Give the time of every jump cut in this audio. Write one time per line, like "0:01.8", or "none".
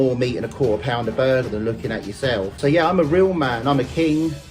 0:02.6